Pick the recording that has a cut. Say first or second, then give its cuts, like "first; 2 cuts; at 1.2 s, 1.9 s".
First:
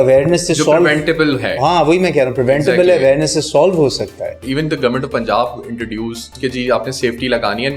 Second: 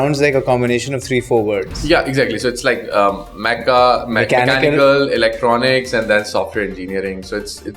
first; 2 cuts; at 4.4 s, 6.3 s